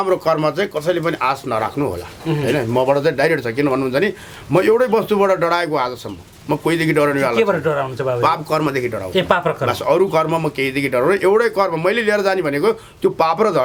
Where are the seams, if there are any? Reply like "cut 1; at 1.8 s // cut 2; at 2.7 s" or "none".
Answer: none